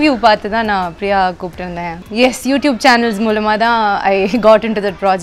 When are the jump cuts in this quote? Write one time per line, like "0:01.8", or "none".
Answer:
0:02.0